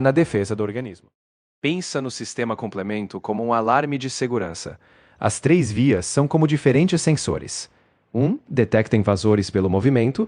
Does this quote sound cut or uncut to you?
uncut